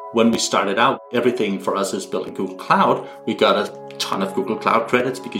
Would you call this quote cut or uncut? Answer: cut